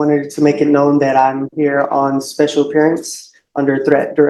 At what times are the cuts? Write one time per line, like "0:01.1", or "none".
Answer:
none